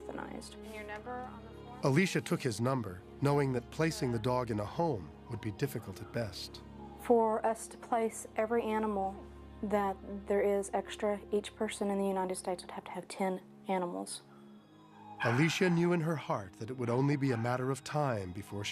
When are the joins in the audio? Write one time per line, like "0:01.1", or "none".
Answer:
0:12.4